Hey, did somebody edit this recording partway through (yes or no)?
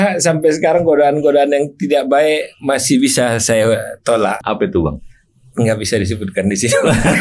yes